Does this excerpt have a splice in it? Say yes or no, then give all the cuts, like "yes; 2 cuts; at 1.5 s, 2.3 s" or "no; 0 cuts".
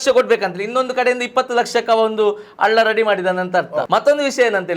yes; 1 cut; at 3.9 s